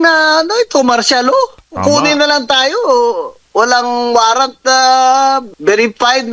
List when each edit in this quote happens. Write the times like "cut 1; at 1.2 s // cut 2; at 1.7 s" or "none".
cut 1; at 1.7 s // cut 2; at 3.3 s // cut 3; at 5.5 s